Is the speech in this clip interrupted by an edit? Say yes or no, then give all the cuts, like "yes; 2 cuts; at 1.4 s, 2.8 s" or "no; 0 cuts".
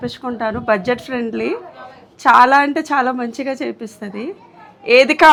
no; 0 cuts